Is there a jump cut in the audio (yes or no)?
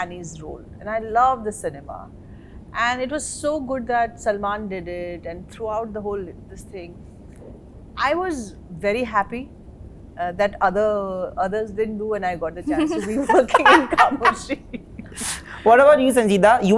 no